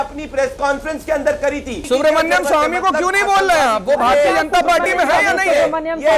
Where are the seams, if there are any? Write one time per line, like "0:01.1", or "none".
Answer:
none